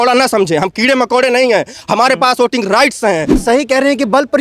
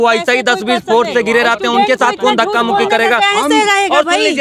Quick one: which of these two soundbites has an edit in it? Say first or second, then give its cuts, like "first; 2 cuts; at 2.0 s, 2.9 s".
first; 1 cut; at 3.3 s